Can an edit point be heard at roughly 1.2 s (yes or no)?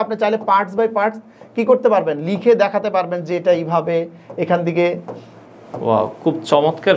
no